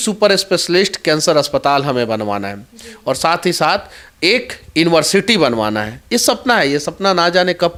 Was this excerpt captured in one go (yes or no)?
yes